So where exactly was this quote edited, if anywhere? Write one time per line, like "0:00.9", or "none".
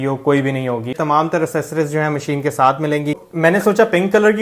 0:01.0
0:03.2